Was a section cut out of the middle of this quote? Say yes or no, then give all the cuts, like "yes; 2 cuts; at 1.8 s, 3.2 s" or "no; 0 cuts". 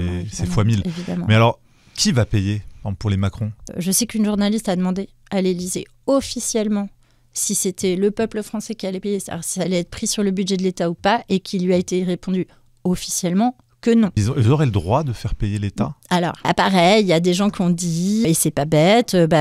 yes; 4 cuts; at 3.6 s, 14.2 s, 16.5 s, 18.2 s